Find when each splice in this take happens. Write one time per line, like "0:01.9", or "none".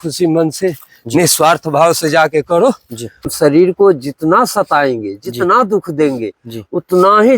0:03.3